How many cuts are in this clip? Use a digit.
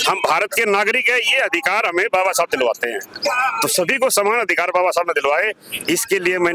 0